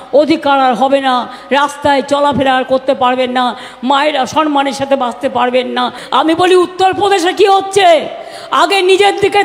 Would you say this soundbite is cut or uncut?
cut